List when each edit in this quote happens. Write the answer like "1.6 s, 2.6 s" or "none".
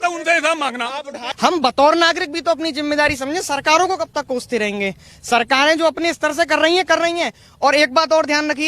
1.2 s

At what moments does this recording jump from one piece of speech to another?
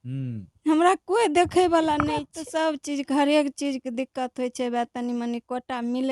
2.4 s

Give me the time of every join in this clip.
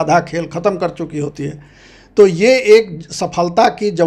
none

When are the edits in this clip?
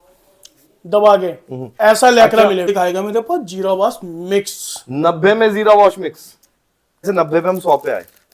2.7 s, 7.0 s

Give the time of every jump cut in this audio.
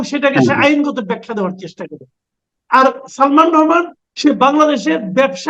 4.0 s

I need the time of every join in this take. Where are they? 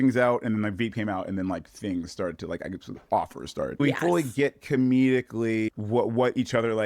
3.7 s

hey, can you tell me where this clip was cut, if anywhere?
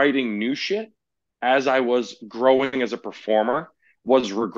none

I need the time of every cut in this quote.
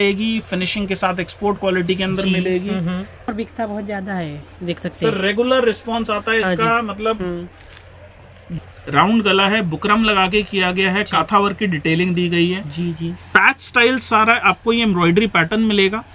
3.3 s, 8.6 s

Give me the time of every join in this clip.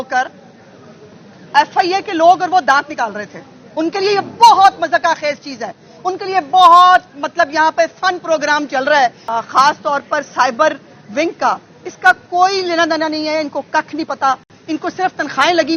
9.2 s

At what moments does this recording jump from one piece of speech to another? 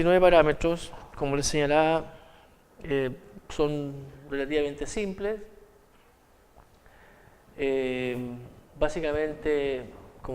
1.5 s

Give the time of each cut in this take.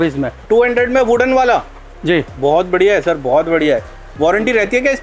none

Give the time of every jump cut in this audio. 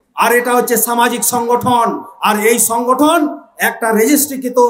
none

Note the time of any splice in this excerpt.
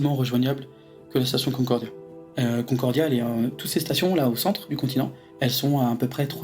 2.1 s, 5.2 s

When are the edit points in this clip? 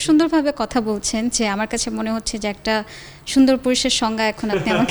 none

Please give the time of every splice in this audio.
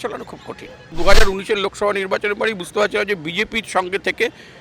1.0 s

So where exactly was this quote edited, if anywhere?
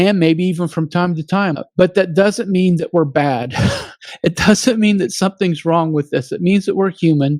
1.6 s

